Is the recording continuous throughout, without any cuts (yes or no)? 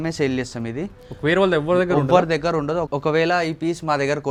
yes